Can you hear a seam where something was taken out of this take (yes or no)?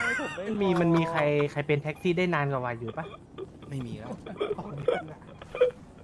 no